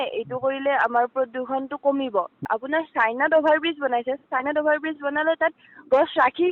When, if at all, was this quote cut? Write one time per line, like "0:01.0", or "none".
0:02.4